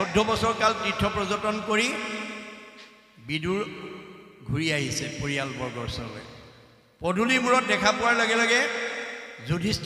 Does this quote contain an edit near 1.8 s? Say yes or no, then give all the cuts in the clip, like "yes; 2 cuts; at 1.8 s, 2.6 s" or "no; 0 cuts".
no; 0 cuts